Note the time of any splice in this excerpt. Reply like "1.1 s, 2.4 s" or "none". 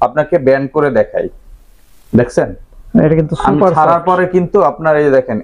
none

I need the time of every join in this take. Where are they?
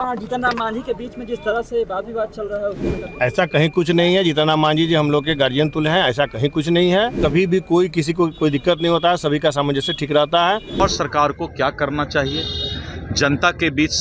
7.2 s, 10.8 s

